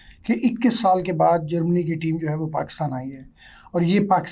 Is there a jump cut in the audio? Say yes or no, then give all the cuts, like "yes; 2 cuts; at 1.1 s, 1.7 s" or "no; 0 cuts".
no; 0 cuts